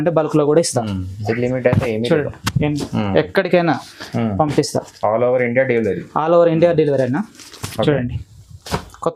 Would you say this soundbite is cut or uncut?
uncut